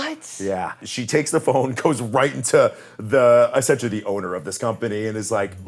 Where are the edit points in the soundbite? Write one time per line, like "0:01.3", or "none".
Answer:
0:00.9